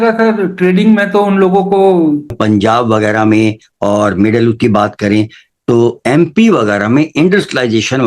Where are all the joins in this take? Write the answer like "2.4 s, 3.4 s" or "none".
2.4 s